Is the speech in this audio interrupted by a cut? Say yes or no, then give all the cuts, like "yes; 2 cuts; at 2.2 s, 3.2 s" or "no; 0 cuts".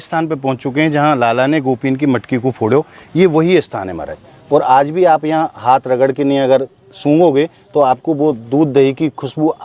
no; 0 cuts